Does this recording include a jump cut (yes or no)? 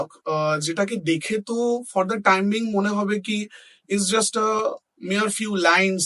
no